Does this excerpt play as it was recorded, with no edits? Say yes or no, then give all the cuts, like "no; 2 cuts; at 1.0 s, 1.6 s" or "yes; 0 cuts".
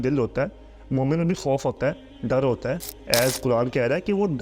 no; 1 cut; at 2.9 s